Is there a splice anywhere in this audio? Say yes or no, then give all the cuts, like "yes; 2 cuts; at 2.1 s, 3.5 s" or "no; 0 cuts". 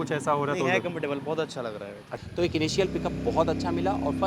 yes; 1 cut; at 2.1 s